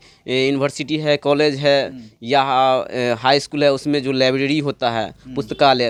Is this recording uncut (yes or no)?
yes